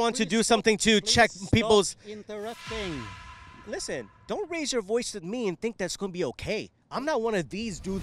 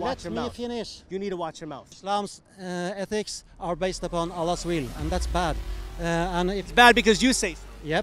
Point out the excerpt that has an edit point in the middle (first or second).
second